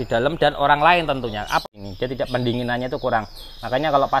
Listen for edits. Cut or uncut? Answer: cut